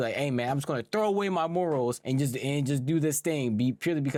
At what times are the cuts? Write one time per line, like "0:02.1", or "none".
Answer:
none

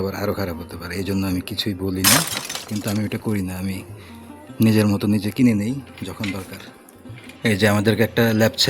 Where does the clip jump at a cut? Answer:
0:02.5
0:07.2

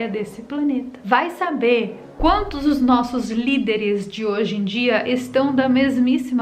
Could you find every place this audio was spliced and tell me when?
0:00.9

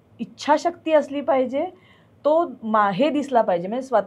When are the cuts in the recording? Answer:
none

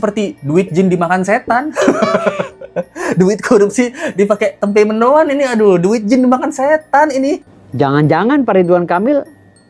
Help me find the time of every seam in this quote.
0:07.6

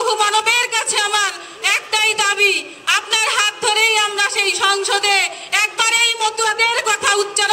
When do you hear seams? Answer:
none

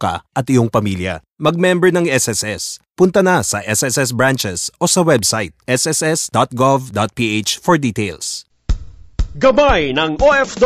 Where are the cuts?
0:08.7

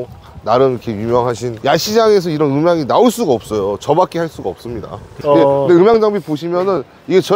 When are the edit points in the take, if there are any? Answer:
0:05.1

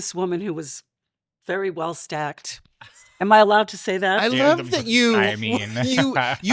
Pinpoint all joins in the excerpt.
none

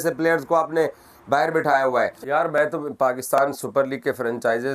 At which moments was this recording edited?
0:02.2

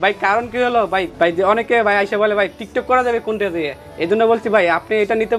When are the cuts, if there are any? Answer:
0:01.1

